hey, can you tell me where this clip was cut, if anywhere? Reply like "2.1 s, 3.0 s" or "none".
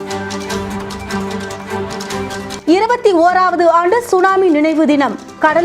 2.6 s